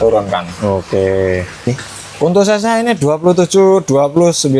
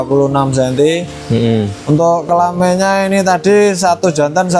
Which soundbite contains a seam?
first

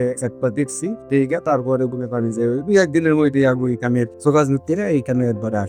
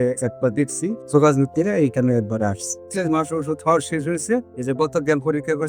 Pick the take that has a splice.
second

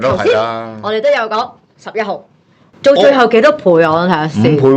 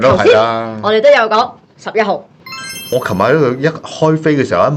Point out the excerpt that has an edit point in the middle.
second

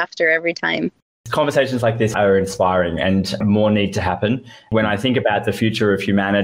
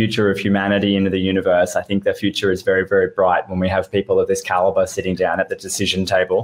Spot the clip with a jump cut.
first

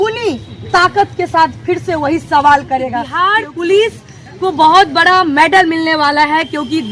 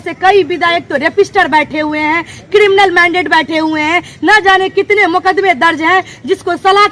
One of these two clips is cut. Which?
first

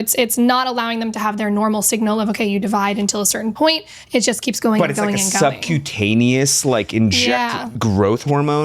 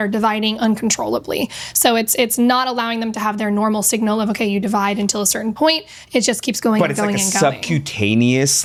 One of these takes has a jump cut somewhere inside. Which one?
first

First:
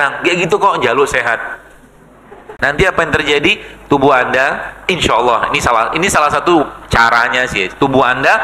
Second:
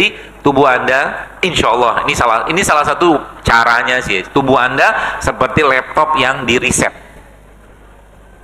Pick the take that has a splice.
first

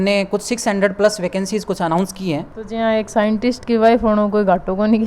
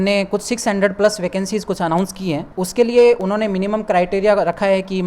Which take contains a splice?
first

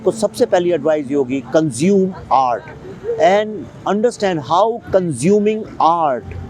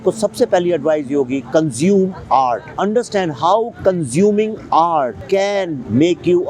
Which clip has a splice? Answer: second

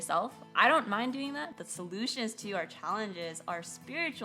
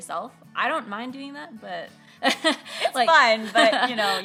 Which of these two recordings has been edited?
first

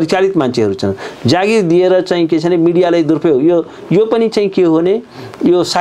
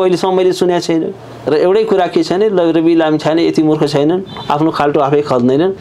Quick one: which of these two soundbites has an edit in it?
second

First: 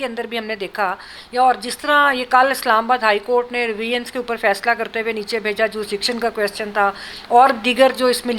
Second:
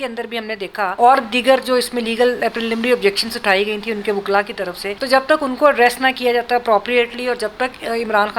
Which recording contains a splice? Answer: second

